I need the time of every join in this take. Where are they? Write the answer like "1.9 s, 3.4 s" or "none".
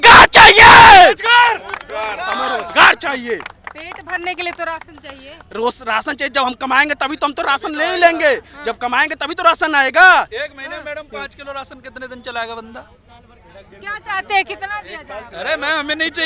none